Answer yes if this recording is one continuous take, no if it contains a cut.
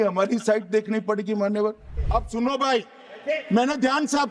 no